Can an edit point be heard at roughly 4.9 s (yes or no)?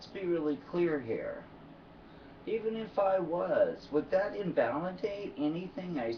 yes